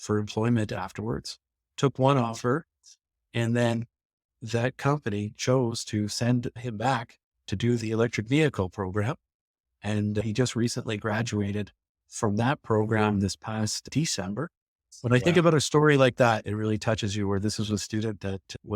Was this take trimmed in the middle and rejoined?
yes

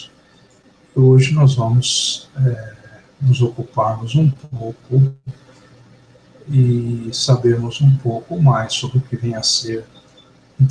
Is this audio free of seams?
no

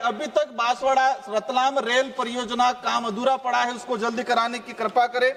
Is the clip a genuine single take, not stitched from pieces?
yes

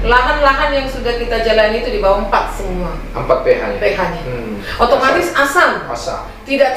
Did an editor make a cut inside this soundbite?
yes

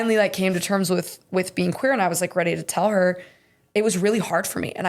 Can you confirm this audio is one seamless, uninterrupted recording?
yes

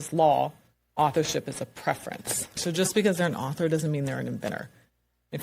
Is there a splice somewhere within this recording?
yes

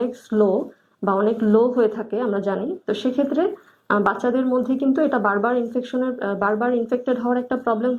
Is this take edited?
no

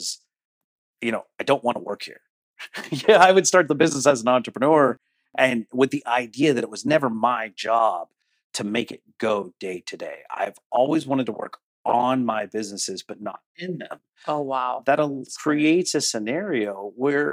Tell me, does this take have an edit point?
no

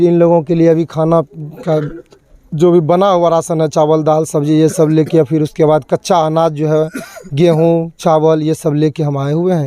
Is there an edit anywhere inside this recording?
no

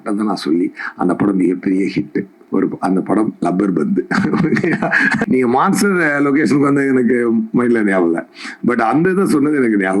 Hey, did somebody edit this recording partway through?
yes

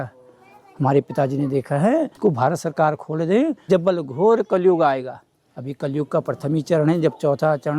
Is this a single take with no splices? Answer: no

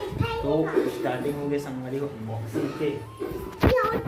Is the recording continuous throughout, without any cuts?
yes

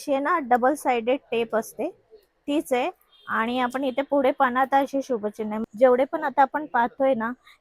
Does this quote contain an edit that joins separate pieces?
yes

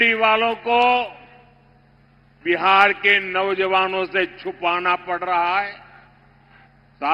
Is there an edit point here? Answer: no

